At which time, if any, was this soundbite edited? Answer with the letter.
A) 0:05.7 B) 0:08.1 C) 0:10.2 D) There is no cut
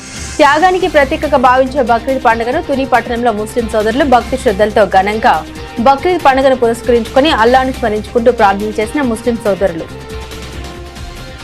D